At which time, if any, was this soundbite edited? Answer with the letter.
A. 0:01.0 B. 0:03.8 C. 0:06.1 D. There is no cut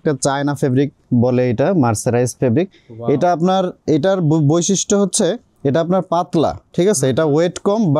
D